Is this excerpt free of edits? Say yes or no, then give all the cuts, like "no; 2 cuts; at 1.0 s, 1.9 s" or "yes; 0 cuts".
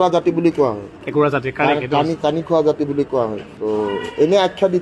no; 1 cut; at 3.5 s